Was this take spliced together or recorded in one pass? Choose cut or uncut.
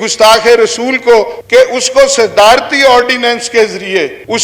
uncut